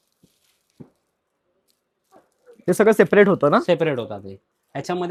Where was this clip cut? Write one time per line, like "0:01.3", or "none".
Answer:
none